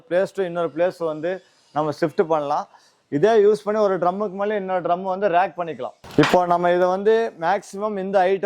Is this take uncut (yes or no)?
no